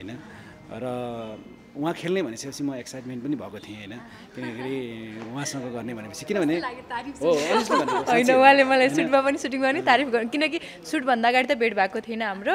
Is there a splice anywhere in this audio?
no; 0 cuts

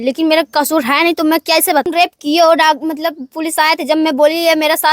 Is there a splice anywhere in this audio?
yes; 1 cut; at 1.8 s

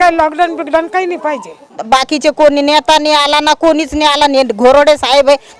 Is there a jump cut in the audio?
yes; 1 cut; at 1.8 s

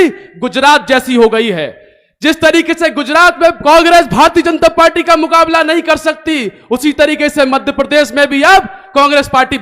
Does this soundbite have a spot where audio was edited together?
yes; 1 cut; at 3.6 s

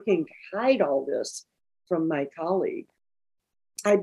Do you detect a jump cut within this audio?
yes; 1 cut; at 3.0 s

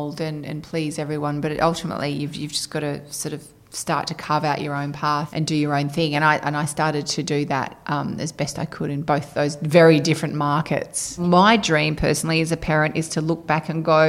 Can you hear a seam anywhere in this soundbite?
yes; 2 cuts; at 5.3 s, 11.2 s

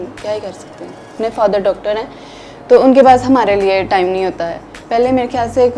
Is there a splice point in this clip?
yes; 1 cut; at 1.1 s

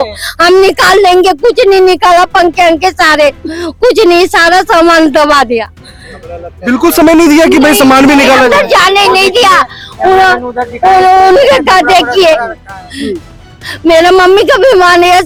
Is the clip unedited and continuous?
yes; 0 cuts

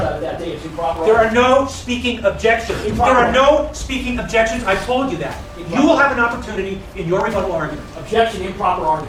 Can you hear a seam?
no; 0 cuts

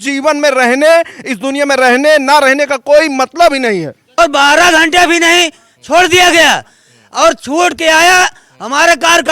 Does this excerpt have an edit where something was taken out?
yes; 1 cut; at 4.0 s

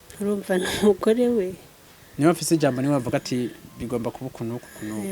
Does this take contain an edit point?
no; 0 cuts

